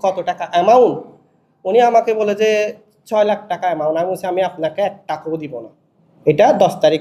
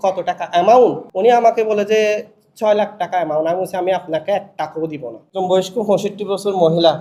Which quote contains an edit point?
second; 2 cuts; at 1.0 s, 5.3 s

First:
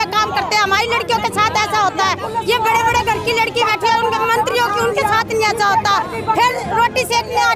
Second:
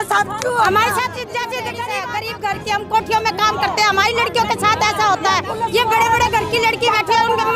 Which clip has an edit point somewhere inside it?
second; 1 cut; at 1.7 s

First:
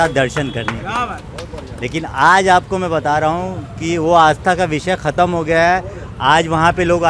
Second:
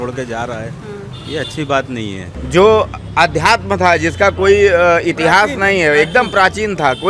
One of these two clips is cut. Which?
second; 1 cut; at 2.3 s

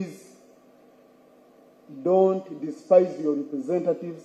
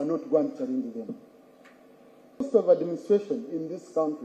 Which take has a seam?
second; 1 cut; at 2.5 s

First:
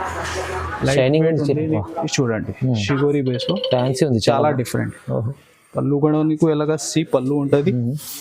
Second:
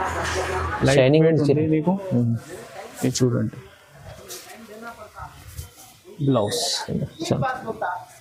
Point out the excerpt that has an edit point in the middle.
first; 1 cut; at 1.8 s

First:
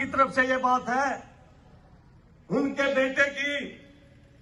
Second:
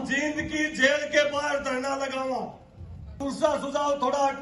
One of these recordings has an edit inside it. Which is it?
second; 1 cut; at 3.2 s

